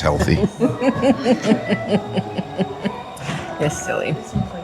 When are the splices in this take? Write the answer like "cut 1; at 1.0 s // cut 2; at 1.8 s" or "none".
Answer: none